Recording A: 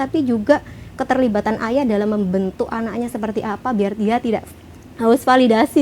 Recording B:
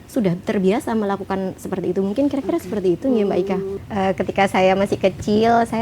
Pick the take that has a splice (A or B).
B